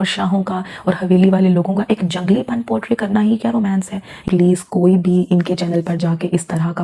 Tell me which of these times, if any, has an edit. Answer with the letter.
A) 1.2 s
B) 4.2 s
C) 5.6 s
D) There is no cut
B